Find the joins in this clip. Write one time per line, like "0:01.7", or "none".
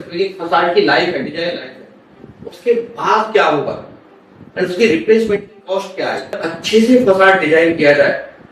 0:06.5